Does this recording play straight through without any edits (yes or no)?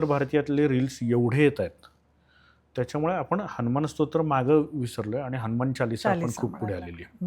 yes